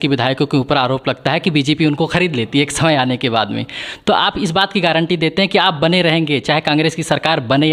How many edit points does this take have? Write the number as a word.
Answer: zero